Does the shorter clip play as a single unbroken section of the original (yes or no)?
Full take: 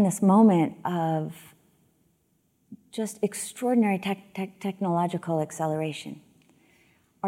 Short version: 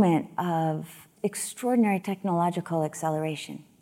no